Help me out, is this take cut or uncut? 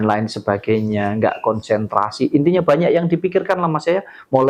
uncut